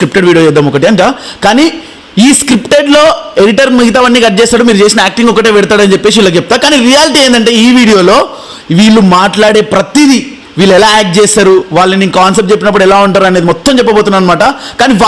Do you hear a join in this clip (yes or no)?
no